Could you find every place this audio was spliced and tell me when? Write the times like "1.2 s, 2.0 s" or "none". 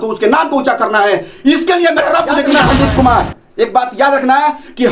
2.5 s